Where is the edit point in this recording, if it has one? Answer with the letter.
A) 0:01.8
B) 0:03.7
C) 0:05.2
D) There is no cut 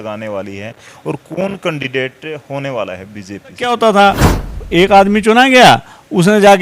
B